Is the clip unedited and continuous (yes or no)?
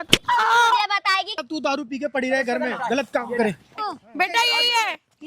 no